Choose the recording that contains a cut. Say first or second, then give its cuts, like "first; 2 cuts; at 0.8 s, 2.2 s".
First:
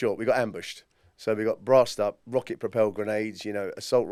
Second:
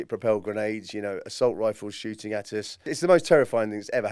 second; 1 cut; at 2.8 s